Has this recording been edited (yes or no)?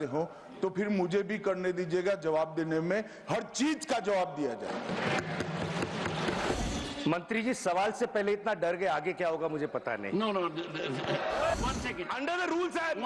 yes